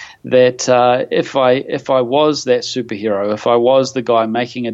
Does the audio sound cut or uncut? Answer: uncut